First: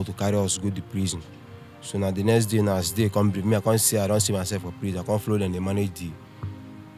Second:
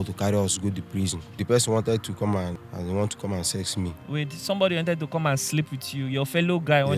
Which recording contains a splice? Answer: second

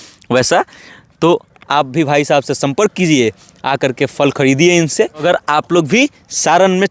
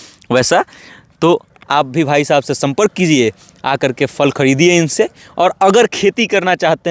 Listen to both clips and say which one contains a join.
first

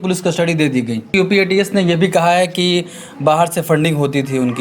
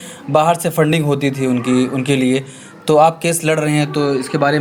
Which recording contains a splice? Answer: first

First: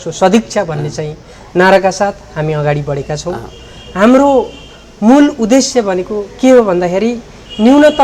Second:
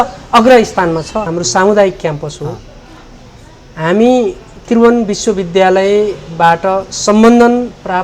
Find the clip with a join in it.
second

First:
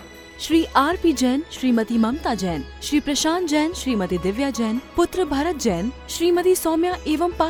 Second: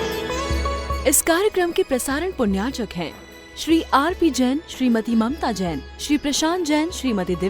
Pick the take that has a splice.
second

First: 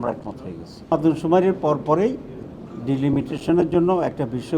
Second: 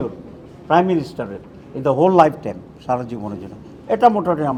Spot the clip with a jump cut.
first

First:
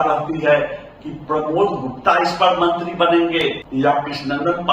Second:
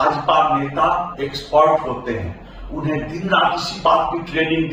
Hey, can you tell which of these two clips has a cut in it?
first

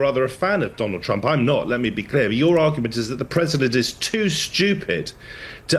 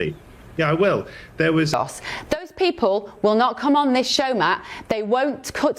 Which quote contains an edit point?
second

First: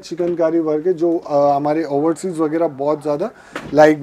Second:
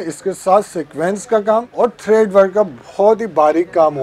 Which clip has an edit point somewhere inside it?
second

